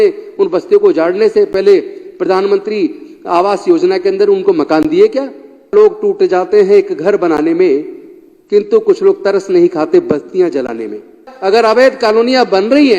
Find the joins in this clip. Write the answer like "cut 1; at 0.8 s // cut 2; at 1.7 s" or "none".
cut 1; at 5.7 s // cut 2; at 11.3 s